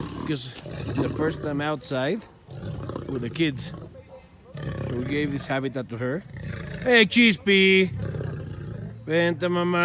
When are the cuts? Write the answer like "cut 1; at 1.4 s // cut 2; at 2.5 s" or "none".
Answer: cut 1; at 4.2 s